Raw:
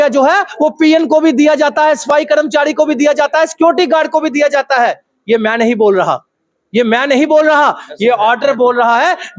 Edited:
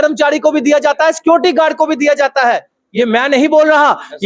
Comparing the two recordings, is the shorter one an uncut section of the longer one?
no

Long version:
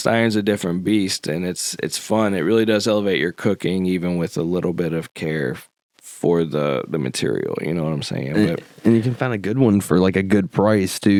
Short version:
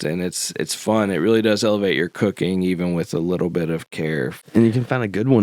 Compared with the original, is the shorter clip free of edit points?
no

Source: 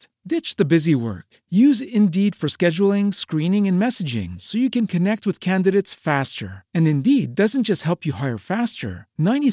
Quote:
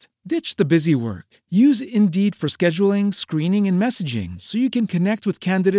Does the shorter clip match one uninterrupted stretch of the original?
yes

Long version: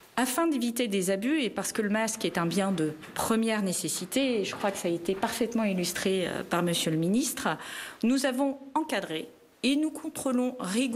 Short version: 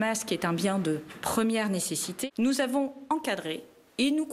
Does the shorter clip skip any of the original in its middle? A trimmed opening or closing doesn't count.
yes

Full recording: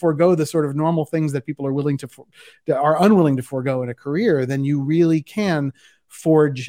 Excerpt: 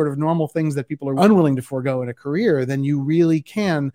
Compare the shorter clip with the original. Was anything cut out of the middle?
yes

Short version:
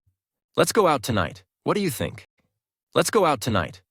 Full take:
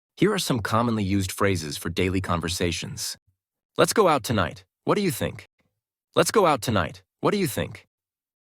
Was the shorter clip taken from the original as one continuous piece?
yes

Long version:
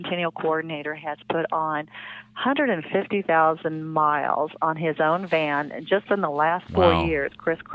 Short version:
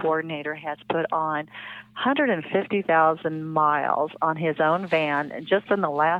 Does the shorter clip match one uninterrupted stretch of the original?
yes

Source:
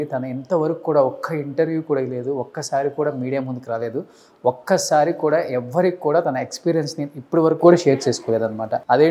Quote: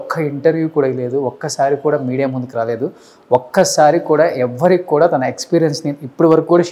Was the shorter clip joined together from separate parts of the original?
no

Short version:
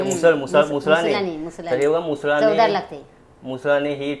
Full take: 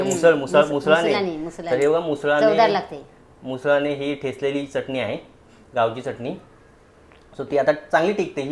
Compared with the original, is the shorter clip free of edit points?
yes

